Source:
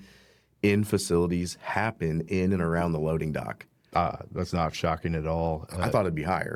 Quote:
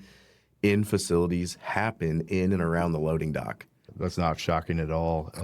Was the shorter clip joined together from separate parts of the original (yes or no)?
yes